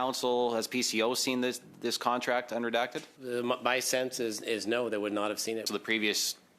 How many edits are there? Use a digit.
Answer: 2